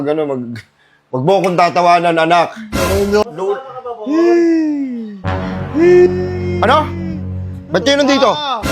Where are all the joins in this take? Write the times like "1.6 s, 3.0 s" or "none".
3.2 s